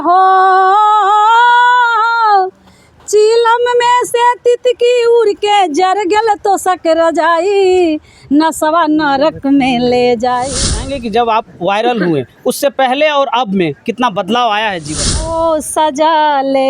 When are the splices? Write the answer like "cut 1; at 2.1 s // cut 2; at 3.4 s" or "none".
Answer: cut 1; at 10.6 s // cut 2; at 15.3 s